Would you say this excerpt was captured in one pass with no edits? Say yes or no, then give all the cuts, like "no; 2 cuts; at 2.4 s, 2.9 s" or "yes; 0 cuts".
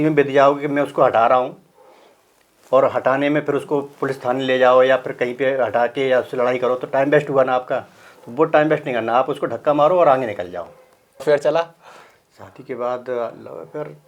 no; 1 cut; at 11.2 s